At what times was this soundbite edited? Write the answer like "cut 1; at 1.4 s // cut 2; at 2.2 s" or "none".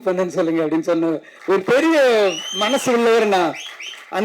cut 1; at 1.3 s